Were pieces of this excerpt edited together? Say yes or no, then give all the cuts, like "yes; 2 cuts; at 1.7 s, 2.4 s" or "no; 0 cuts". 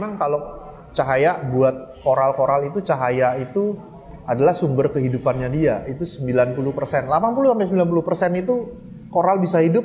no; 0 cuts